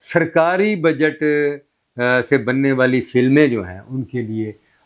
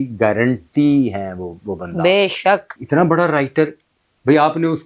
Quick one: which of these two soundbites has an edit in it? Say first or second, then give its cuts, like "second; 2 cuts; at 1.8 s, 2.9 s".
second; 1 cut; at 2.7 s